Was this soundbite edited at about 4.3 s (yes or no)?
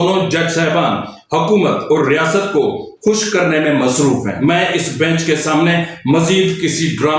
yes